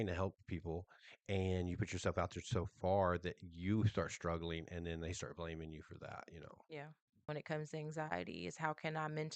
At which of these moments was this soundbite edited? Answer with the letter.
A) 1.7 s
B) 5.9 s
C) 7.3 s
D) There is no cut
C